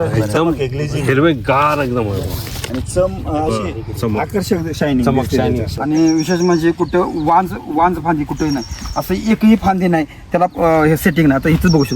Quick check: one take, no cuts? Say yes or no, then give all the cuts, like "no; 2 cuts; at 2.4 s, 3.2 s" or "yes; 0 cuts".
no; 1 cut; at 5.7 s